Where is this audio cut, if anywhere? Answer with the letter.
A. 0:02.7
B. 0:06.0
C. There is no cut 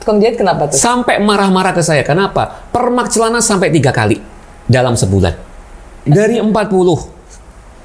B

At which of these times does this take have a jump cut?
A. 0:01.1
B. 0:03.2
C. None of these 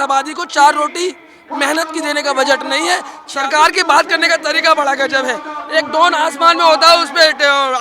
B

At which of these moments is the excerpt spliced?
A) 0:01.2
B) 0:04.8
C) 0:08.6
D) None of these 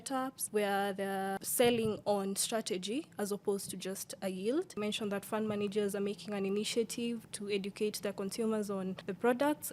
B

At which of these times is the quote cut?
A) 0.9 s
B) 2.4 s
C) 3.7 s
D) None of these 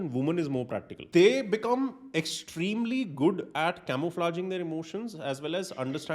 A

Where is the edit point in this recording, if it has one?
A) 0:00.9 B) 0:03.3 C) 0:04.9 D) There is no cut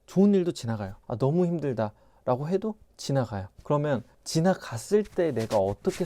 A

